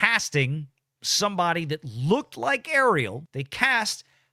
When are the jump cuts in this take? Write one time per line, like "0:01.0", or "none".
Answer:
0:03.2